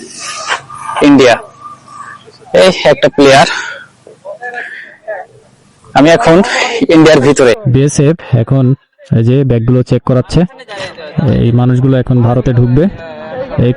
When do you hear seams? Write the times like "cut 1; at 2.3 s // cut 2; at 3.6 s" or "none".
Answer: cut 1; at 7.6 s